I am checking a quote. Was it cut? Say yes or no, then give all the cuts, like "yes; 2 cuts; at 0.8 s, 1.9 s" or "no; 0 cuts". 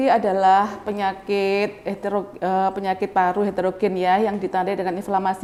no; 0 cuts